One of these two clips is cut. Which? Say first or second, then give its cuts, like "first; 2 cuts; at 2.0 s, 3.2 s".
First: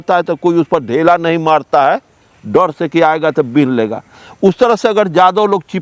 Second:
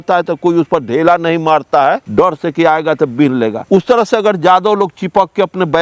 second; 2 cuts; at 2.0 s, 3.6 s